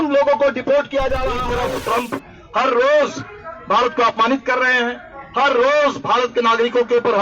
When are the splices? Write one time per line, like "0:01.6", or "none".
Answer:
0:01.5